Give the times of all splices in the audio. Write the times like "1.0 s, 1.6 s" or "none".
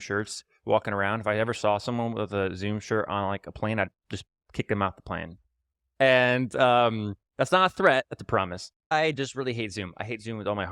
8.8 s